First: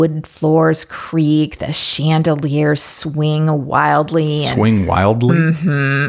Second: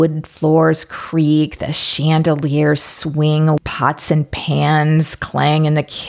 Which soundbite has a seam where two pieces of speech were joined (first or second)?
second